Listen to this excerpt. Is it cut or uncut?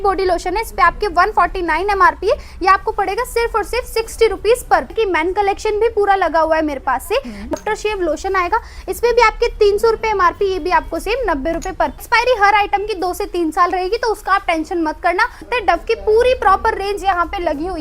cut